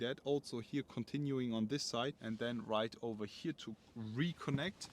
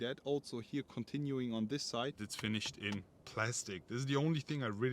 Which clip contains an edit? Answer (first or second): second